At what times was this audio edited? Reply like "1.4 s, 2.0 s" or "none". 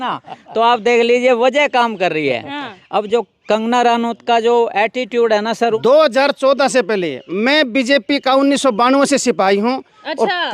5.8 s